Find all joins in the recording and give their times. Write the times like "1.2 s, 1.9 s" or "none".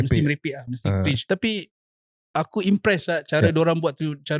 1.2 s